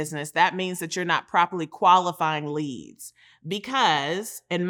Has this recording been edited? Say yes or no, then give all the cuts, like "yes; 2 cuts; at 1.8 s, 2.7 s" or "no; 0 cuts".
no; 0 cuts